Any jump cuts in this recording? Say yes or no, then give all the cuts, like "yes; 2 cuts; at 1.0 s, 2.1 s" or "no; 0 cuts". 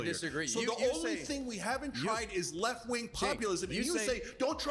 no; 0 cuts